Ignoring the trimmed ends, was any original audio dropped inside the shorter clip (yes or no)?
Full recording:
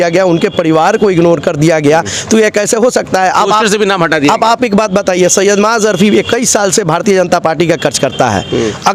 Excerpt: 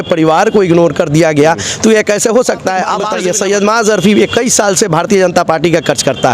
yes